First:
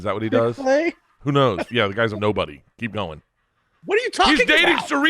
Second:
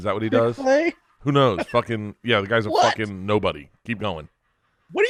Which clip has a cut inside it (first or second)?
first